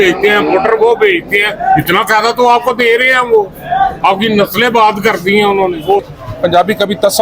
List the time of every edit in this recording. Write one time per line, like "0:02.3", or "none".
0:06.1